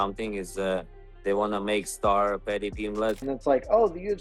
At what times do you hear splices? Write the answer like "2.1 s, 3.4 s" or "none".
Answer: 3.2 s